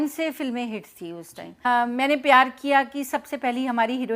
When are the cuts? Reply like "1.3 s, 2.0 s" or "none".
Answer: 1.7 s